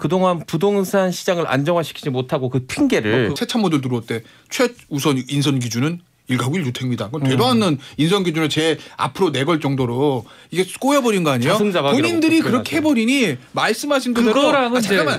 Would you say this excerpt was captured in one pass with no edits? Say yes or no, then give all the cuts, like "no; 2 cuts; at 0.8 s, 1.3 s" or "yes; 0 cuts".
no; 1 cut; at 3.3 s